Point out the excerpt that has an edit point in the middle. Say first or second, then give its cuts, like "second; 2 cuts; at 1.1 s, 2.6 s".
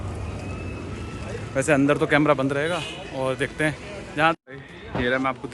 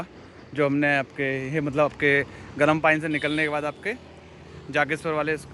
first; 1 cut; at 4.4 s